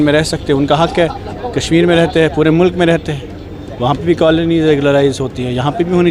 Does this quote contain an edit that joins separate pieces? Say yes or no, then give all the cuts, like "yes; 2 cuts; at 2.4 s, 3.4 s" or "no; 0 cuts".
no; 0 cuts